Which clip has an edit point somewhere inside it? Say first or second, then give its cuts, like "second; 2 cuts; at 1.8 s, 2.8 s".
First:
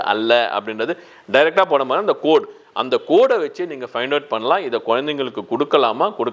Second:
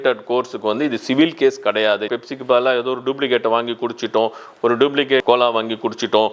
second; 2 cuts; at 2.1 s, 5.2 s